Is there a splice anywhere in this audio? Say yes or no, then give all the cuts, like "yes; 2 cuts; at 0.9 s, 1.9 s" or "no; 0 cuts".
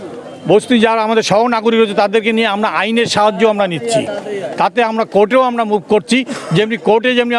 no; 0 cuts